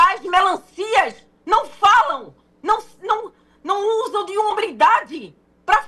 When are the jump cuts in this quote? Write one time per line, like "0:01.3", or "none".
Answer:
none